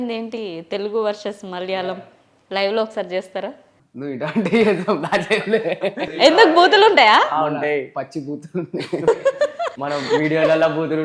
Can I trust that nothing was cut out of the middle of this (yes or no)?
yes